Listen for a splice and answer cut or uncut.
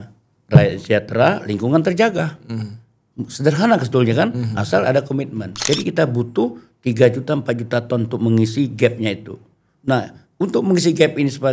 cut